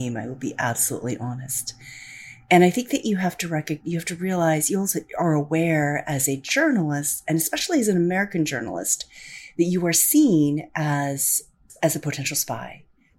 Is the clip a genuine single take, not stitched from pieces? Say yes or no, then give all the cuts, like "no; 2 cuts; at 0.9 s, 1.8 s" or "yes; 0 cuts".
no; 1 cut; at 11.7 s